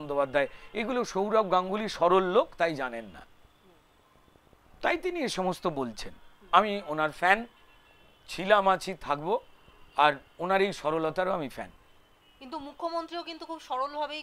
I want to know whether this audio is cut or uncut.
uncut